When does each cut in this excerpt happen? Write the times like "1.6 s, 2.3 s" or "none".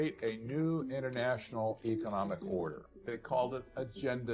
3.0 s